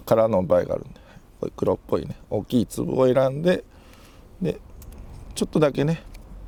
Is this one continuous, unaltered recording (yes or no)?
yes